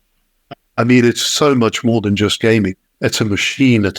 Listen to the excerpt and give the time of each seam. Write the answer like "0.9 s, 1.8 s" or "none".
2.9 s